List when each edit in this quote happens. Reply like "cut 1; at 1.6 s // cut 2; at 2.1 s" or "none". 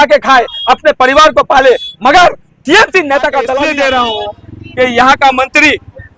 cut 1; at 3.6 s